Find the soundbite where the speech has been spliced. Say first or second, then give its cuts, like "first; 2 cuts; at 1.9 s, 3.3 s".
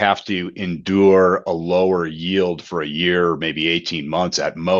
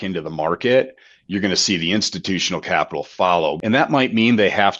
second; 1 cut; at 3.6 s